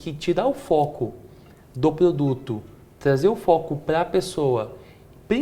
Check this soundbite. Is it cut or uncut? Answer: uncut